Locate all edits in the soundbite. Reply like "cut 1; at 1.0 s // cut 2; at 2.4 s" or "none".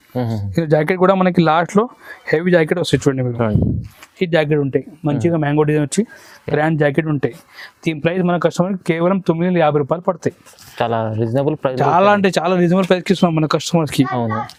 none